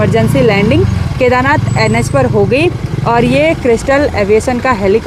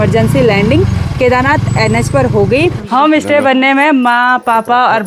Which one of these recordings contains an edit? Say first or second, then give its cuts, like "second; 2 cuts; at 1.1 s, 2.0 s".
second; 1 cut; at 2.8 s